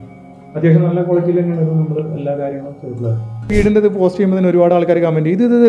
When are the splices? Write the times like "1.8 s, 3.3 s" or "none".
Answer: 3.5 s